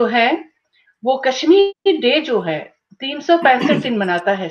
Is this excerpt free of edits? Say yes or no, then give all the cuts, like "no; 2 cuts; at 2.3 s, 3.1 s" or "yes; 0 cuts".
no; 1 cut; at 1.8 s